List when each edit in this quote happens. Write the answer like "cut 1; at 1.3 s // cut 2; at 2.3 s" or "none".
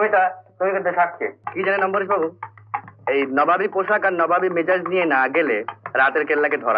cut 1; at 1.3 s